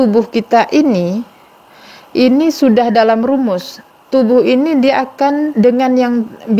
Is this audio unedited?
yes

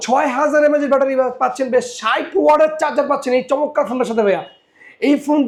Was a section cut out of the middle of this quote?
no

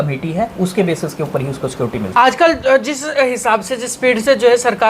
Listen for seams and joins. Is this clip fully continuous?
no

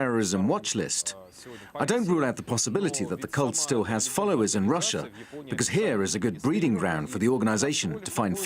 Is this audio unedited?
no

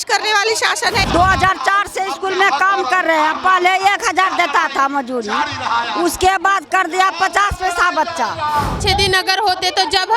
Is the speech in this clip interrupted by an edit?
yes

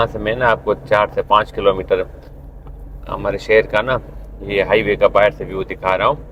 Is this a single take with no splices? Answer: yes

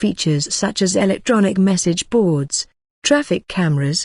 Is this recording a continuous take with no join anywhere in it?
yes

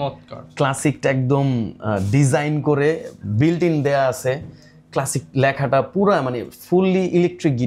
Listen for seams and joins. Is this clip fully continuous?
yes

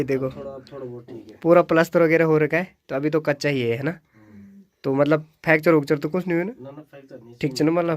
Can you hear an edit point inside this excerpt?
no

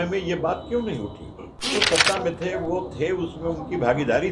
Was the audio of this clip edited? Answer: yes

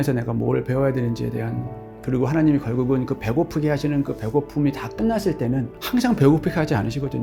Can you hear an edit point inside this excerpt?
no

